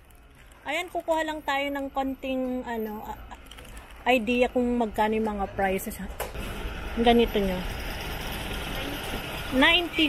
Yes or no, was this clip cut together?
yes